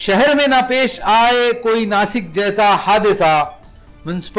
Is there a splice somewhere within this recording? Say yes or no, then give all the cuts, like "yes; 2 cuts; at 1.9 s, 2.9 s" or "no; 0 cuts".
no; 0 cuts